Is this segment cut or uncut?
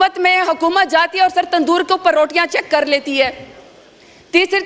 uncut